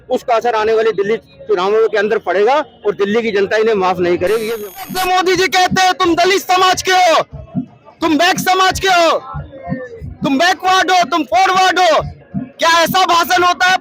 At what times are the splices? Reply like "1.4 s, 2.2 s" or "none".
4.7 s